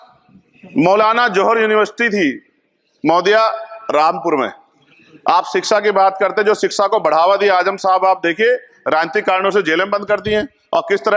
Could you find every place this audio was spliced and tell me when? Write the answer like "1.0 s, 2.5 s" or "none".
none